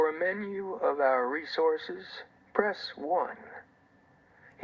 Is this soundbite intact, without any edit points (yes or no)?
no